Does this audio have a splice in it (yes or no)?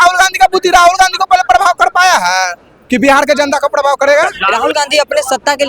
yes